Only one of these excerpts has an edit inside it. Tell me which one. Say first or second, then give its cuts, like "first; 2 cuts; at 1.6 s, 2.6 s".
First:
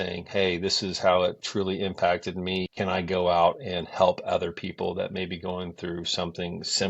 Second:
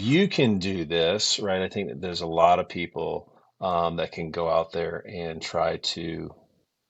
first; 1 cut; at 2.7 s